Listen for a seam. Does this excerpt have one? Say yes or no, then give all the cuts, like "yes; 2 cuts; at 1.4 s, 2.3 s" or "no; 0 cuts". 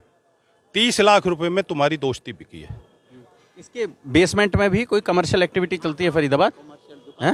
no; 0 cuts